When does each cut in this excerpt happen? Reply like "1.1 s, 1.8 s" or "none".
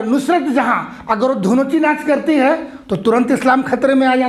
none

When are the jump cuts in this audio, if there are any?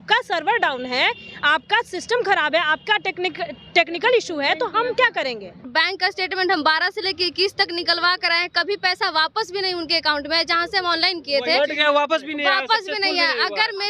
5.7 s

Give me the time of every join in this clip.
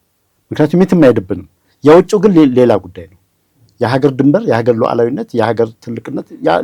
none

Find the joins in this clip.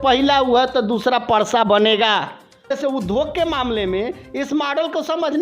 2.7 s

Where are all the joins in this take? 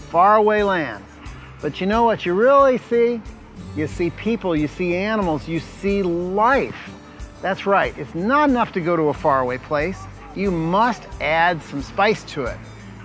none

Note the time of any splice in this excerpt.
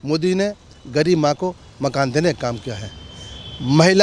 none

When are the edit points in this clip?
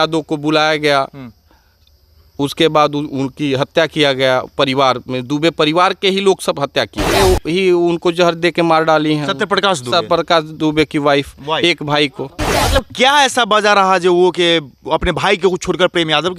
7.1 s, 12.5 s

